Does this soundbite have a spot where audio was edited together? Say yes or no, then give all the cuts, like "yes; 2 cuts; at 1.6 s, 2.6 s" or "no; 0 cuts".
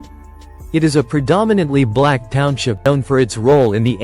yes; 1 cut; at 2.8 s